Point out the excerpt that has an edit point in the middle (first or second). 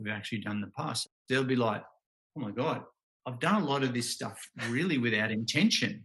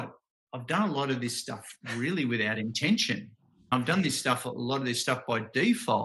first